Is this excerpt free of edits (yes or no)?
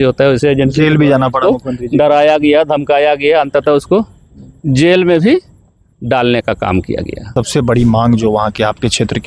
no